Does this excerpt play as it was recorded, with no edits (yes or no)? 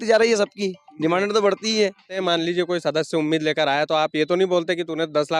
no